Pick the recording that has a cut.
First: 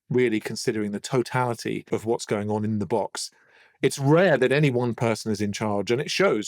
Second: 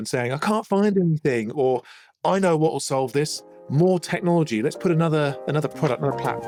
first; 1 cut; at 1.8 s

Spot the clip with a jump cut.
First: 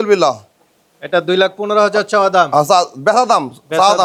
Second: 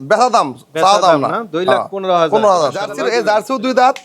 second; 1 cut; at 3.0 s

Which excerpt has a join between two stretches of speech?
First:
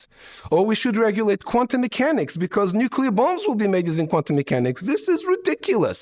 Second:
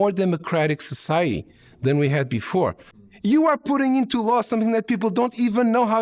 second; 1 cut; at 2.9 s

